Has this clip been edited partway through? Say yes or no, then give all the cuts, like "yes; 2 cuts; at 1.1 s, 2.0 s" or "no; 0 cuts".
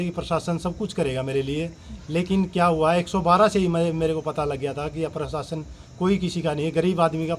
no; 0 cuts